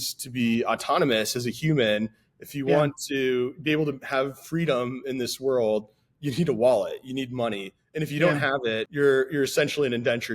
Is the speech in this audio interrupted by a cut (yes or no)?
yes